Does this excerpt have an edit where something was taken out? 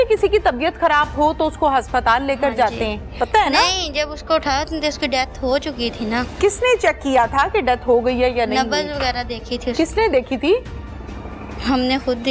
no; 0 cuts

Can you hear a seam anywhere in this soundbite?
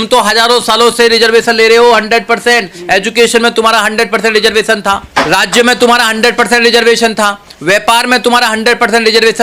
no; 0 cuts

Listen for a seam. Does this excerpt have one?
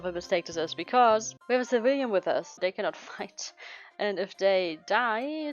yes; 2 cuts; at 1.3 s, 2.6 s

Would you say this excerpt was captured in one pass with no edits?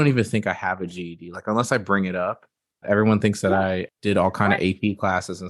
no; 2 cuts; at 2.8 s, 3.9 s

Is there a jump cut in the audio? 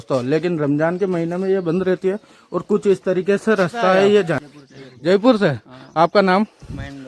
yes; 1 cut; at 4.4 s

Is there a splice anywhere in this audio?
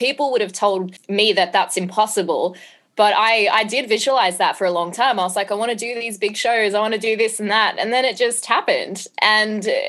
yes; 1 cut; at 1.0 s

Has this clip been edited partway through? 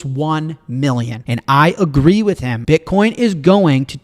yes; 2 cuts; at 1.2 s, 2.5 s

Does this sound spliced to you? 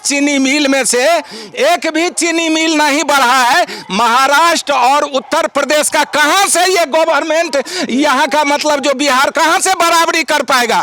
no; 0 cuts

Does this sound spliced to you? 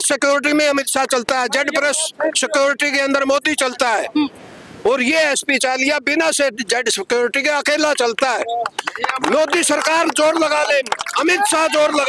no; 0 cuts

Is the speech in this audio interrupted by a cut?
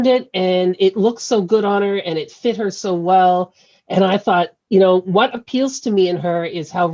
no; 0 cuts

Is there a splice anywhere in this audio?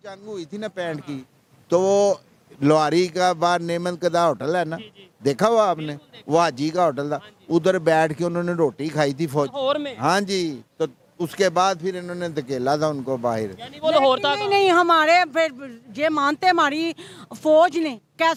no; 0 cuts

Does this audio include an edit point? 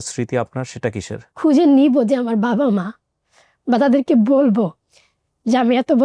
yes; 1 cut; at 1.4 s

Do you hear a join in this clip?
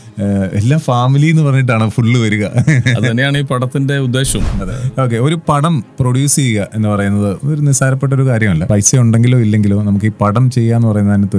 yes; 2 cuts; at 4.6 s, 8.6 s

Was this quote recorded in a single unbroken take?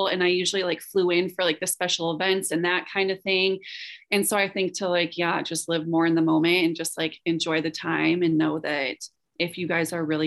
yes; 0 cuts

